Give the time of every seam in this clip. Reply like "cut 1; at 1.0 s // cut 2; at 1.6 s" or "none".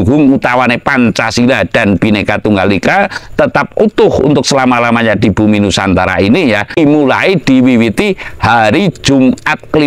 cut 1; at 6.8 s